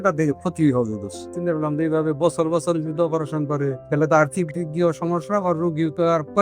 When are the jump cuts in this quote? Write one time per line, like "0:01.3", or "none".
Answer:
0:01.3
0:03.8